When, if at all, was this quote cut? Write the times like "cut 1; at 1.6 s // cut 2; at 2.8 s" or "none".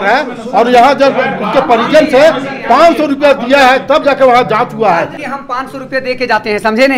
cut 1; at 5.2 s